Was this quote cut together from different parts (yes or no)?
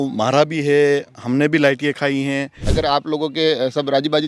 yes